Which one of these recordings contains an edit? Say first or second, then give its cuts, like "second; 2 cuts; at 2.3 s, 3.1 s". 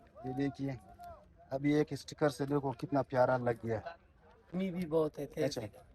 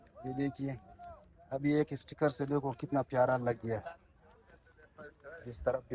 first; 1 cut; at 4.5 s